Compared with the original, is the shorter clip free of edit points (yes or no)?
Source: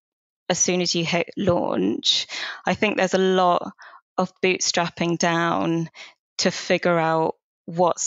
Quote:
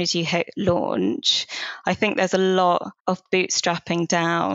no